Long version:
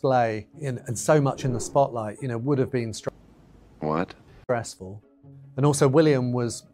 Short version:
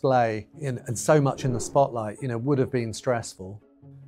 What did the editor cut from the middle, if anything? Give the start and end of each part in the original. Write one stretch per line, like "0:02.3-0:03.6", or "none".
0:03.0-0:04.4

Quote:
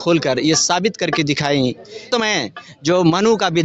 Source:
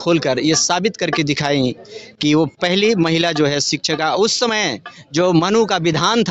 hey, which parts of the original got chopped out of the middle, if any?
0:02.0-0:04.3

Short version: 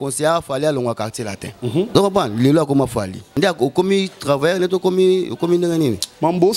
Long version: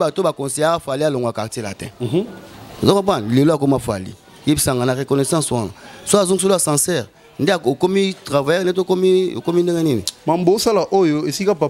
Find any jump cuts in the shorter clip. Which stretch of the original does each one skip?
0:02.3-0:02.9
0:04.1-0:07.3

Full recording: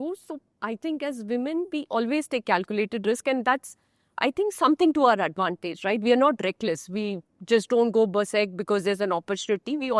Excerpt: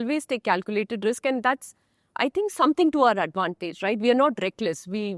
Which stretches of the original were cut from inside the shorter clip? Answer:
none

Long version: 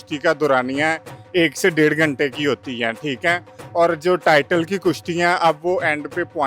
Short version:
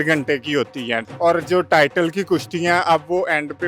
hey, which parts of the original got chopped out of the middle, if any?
0:02.9-0:03.6

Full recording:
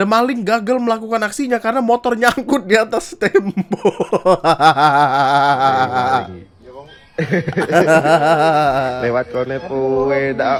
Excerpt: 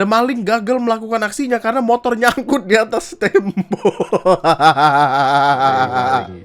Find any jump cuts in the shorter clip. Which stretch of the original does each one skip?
none

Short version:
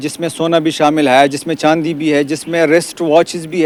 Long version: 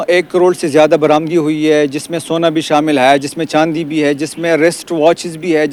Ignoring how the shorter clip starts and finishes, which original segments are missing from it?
none

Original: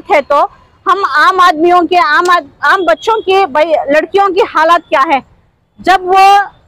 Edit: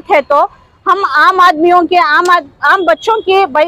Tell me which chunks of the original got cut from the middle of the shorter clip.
none

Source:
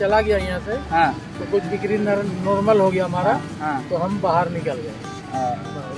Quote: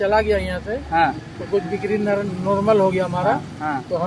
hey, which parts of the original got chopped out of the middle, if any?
none

